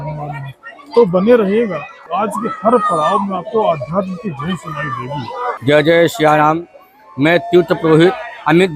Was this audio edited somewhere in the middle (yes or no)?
yes